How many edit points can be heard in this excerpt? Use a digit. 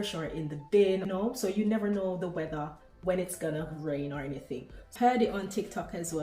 2